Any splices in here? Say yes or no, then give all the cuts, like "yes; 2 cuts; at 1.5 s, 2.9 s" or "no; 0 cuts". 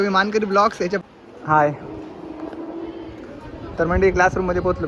yes; 1 cut; at 1.0 s